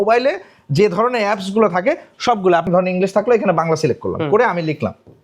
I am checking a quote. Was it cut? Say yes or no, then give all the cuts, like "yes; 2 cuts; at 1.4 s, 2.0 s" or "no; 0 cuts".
yes; 1 cut; at 2.7 s